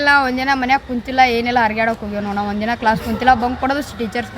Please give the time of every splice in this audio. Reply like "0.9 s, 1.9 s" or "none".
none